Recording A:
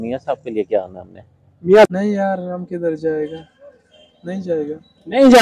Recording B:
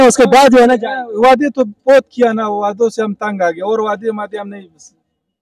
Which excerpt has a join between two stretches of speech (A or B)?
A